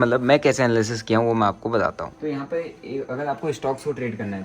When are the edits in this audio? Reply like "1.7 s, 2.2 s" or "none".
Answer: 2.1 s